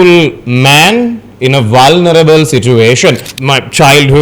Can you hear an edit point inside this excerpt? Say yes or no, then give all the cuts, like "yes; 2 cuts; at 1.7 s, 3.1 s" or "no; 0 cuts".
yes; 1 cut; at 3.3 s